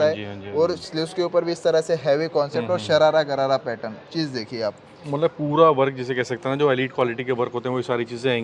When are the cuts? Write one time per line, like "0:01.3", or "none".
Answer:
none